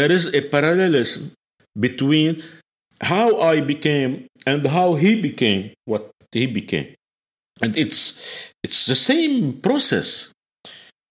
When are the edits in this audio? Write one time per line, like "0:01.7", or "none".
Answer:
0:07.0